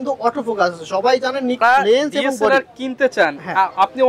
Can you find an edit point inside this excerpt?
yes; 1 cut; at 1.6 s

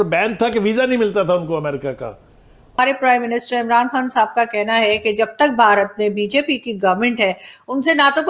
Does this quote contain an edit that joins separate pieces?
yes; 1 cut; at 2.8 s

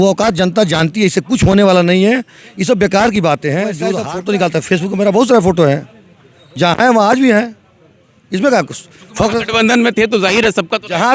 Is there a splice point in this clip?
yes; 1 cut; at 4.0 s

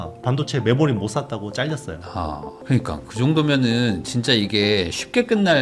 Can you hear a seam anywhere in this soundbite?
no; 0 cuts

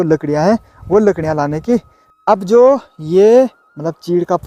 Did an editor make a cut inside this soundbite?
yes; 1 cut; at 2.0 s

